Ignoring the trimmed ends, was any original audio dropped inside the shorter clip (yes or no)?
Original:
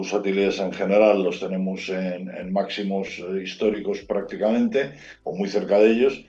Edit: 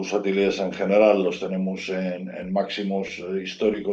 no